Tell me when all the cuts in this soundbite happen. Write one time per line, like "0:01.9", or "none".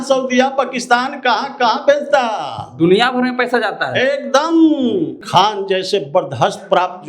0:05.2